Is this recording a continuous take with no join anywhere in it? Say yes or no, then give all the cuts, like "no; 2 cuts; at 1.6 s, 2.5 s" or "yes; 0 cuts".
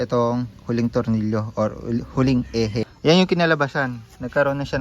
no; 1 cut; at 2.9 s